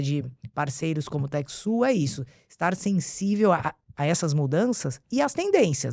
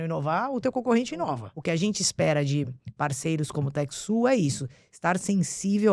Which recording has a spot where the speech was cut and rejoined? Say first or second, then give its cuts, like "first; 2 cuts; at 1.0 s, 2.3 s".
second; 1 cut; at 1.5 s